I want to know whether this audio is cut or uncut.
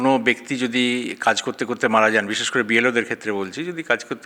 uncut